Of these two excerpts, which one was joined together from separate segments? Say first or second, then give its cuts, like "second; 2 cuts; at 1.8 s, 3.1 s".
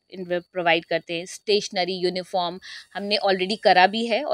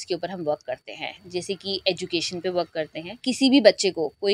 second; 1 cut; at 3.2 s